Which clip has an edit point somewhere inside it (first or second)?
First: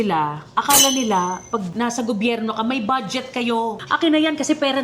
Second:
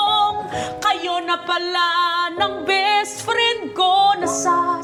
first